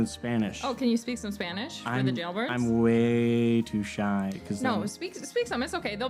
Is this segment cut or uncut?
uncut